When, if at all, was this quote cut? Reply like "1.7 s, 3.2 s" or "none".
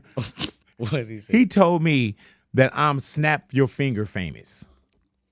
none